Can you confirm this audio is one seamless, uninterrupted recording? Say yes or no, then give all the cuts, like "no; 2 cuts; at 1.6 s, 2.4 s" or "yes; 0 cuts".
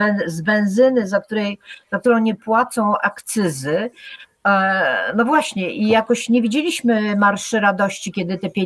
yes; 0 cuts